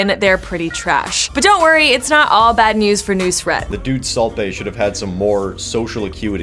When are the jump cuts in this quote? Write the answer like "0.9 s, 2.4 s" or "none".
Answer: 1.2 s, 3.6 s